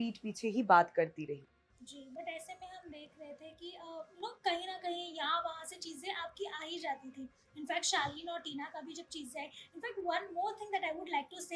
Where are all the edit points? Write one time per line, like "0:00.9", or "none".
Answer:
none